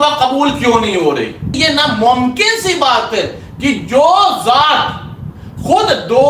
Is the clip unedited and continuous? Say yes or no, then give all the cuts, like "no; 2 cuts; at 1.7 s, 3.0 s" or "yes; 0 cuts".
no; 1 cut; at 1.5 s